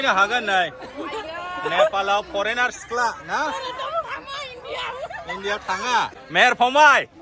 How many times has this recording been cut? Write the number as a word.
one